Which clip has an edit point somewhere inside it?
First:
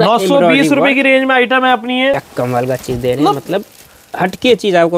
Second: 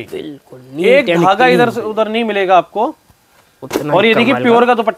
first; 1 cut; at 2.1 s

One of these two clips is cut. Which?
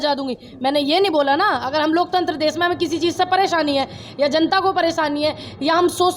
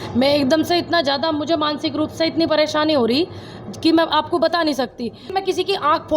second; 2 cuts; at 1.7 s, 5.2 s

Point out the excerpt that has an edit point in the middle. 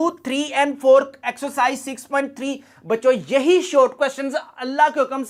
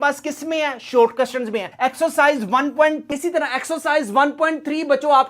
second; 1 cut; at 3.0 s

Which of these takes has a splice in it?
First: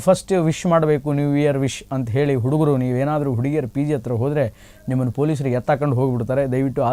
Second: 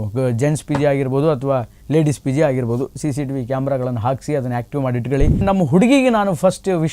second; 1 cut; at 5.4 s

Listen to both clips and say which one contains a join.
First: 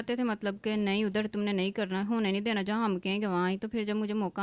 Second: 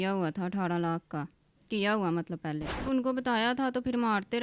second; 1 cut; at 2.8 s

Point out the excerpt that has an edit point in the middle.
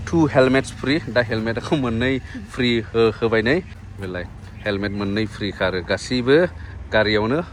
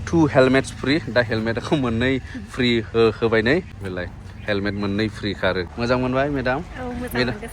second; 2 cuts; at 3.8 s, 5.7 s

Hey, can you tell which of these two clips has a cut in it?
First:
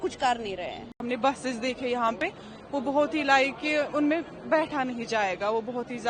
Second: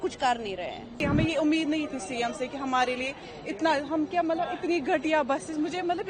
second; 1 cut; at 1.0 s

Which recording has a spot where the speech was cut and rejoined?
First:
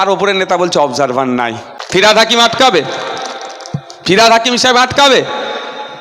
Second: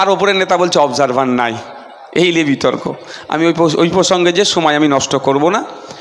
first; 1 cut; at 1.7 s

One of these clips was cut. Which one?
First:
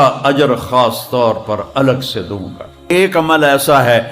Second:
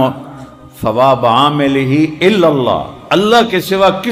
first; 1 cut; at 2.9 s

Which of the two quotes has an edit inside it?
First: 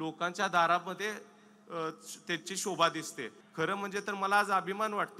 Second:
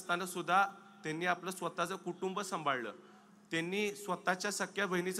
first; 1 cut; at 3.4 s

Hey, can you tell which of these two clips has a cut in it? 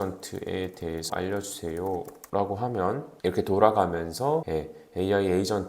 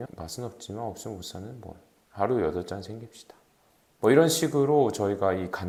first; 4 cuts; at 1.1 s, 2.2 s, 3.1 s, 4.5 s

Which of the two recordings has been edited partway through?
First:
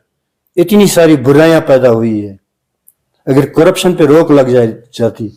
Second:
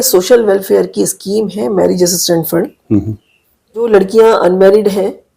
second; 1 cut; at 3.9 s

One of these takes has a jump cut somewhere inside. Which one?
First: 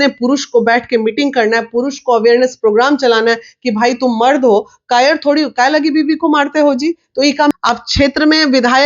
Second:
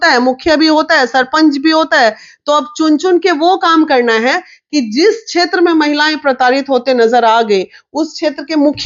first; 1 cut; at 7.5 s

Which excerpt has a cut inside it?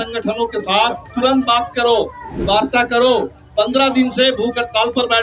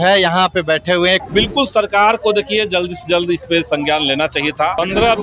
second; 1 cut; at 1.2 s

